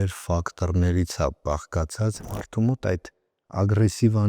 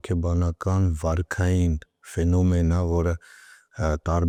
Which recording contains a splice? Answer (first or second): first